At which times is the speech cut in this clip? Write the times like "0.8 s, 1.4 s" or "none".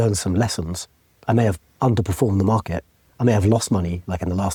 none